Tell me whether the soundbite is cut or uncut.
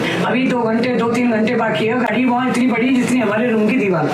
uncut